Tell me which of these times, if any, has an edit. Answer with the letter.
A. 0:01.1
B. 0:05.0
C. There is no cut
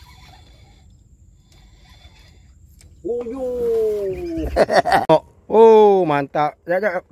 B